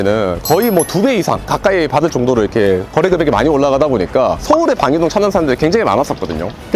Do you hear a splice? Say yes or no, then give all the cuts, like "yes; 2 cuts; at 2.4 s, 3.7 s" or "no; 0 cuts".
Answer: no; 0 cuts